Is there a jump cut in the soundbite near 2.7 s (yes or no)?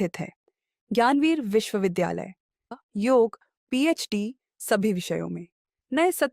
yes